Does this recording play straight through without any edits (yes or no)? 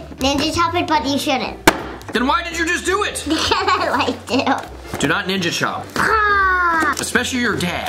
no